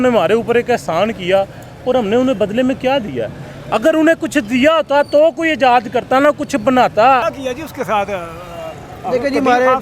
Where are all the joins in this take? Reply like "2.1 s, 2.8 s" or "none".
none